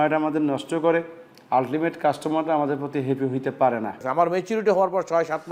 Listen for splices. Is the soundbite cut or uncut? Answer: cut